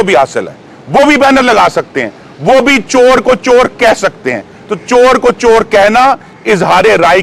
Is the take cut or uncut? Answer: uncut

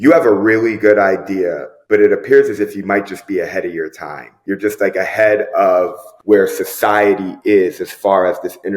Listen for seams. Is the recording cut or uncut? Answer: uncut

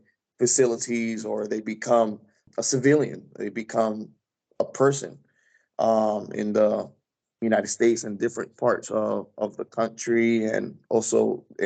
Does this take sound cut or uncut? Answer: uncut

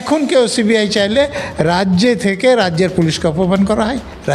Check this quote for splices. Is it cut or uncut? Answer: uncut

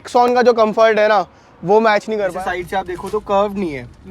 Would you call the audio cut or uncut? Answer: cut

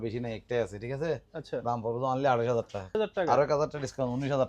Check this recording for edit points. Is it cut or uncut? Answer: cut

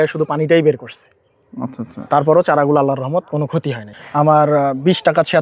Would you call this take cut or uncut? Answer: cut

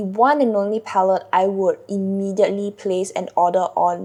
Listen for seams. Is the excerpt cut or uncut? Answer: uncut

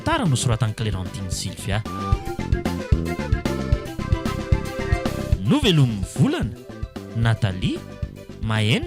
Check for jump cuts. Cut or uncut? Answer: cut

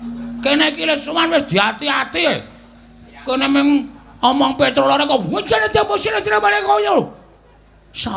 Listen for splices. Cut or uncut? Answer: uncut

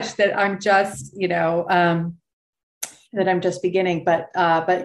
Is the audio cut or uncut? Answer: uncut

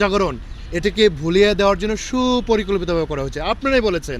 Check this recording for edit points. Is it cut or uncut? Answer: uncut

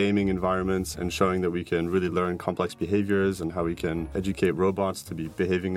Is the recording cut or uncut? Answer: cut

